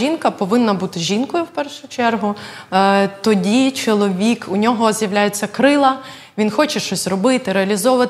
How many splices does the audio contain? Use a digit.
0